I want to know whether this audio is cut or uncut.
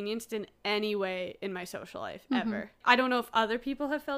cut